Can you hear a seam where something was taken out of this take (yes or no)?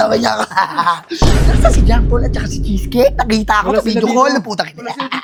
no